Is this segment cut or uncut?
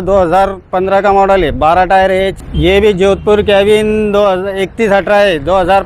cut